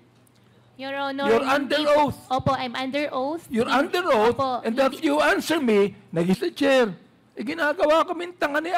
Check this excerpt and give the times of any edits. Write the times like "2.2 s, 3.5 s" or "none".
6.4 s

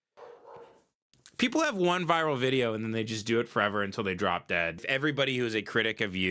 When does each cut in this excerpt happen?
4.8 s

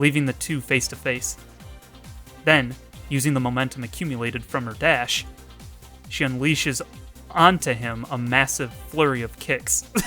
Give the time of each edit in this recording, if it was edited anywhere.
none

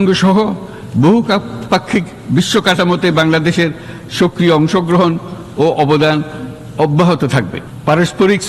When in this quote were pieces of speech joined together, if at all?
none

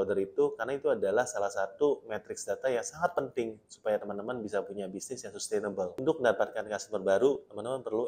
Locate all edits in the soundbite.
6.2 s

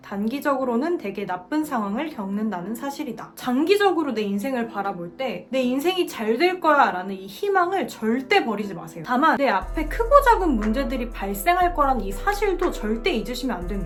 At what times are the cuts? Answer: none

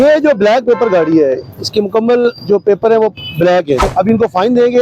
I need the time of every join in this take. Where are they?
3.9 s

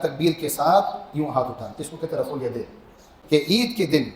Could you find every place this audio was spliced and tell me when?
3.1 s

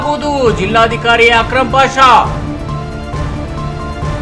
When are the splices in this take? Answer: none

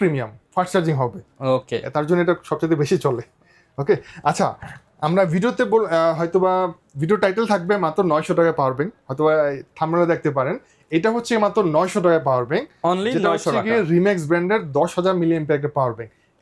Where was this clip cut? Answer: none

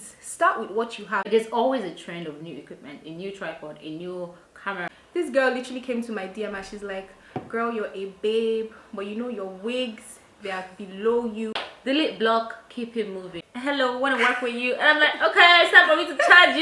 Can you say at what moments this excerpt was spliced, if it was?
1.3 s, 4.9 s, 11.5 s, 13.4 s

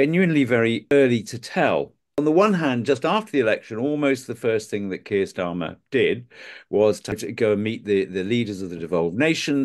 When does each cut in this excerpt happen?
0.9 s, 2.0 s, 7.2 s

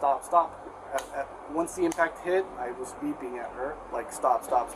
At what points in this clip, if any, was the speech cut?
3.8 s

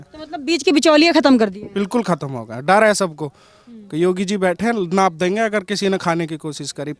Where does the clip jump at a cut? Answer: none

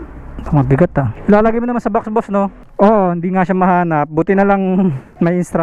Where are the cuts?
2.6 s

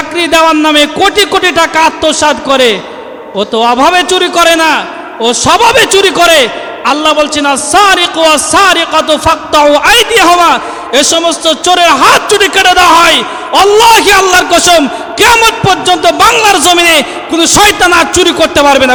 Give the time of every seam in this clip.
none

